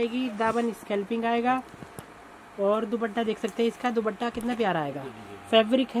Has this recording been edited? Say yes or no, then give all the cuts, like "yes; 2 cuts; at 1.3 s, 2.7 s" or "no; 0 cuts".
no; 0 cuts